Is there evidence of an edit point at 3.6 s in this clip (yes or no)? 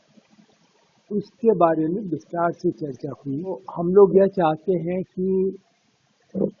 yes